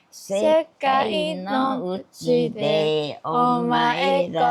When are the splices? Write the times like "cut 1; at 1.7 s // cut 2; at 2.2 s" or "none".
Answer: none